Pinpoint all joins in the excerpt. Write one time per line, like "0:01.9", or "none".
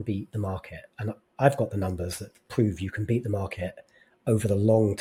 none